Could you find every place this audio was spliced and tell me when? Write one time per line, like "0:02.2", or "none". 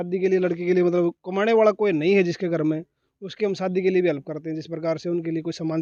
none